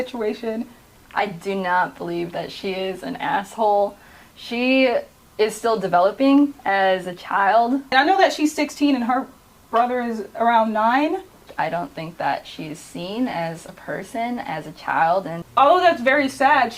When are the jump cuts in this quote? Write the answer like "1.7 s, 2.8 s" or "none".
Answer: 1.0 s, 7.9 s, 11.4 s, 15.4 s